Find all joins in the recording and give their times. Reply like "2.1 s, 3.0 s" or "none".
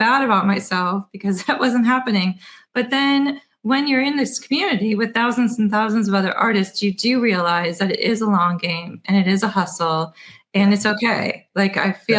none